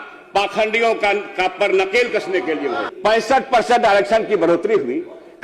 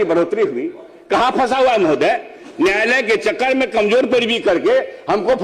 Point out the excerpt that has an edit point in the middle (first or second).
first